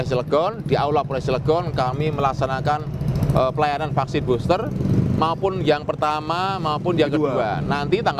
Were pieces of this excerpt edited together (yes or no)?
no